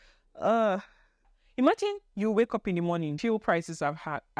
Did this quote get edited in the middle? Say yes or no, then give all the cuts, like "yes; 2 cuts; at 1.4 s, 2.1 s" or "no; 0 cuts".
yes; 2 cuts; at 1.4 s, 3.2 s